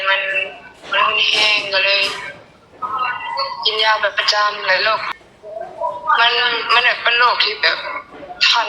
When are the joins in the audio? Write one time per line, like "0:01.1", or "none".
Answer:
0:05.1